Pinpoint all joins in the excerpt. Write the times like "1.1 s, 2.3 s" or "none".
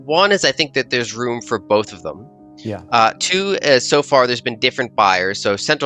none